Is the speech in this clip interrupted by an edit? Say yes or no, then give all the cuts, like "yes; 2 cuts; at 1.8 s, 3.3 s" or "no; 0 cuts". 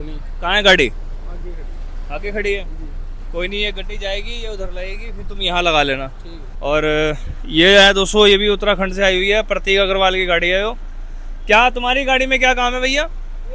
no; 0 cuts